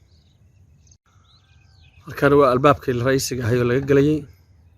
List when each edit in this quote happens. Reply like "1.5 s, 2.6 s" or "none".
1.0 s